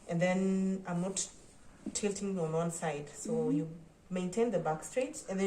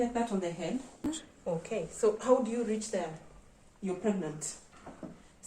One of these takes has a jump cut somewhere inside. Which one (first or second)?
second